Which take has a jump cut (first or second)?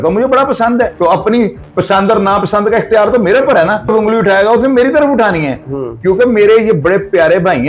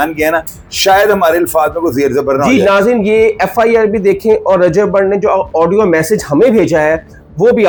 first